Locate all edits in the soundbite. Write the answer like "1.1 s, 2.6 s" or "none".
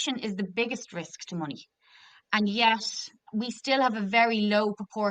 3.2 s